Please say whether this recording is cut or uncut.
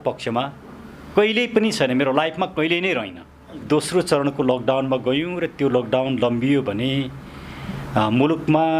cut